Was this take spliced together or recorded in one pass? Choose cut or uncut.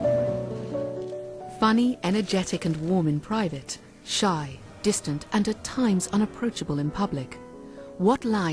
uncut